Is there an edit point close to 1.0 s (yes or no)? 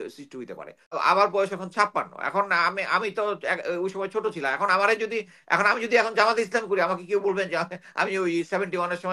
yes